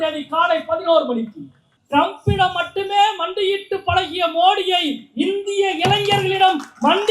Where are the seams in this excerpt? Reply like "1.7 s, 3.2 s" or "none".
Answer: 1.7 s